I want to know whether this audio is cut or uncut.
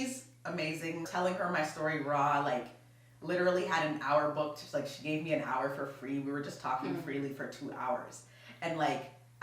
cut